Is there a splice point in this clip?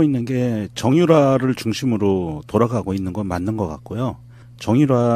yes; 1 cut; at 1.2 s

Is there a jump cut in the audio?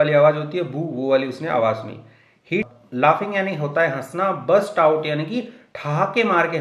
yes; 1 cut; at 2.7 s

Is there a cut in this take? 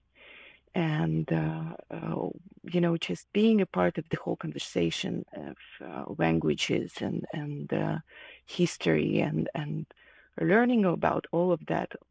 no; 0 cuts

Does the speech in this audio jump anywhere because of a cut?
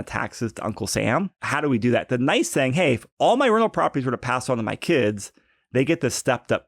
yes; 1 cut; at 1.4 s

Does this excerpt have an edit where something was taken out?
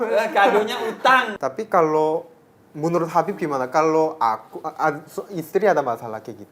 yes; 1 cut; at 1.3 s

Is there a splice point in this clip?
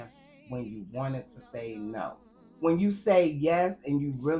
yes; 1 cut; at 2.4 s

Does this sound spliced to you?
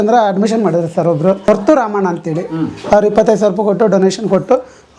yes; 1 cut; at 1.4 s

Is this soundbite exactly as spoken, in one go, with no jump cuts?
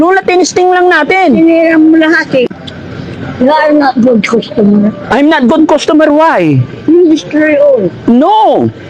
no; 1 cut; at 2.5 s

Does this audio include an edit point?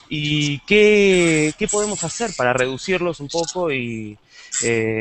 no; 0 cuts

